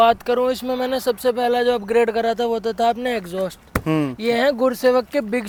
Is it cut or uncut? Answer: uncut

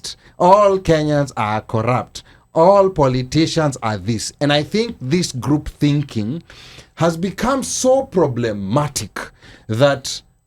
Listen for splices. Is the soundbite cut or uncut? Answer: uncut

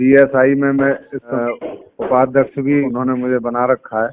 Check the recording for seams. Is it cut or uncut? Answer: cut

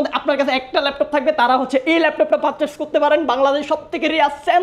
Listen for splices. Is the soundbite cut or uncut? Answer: uncut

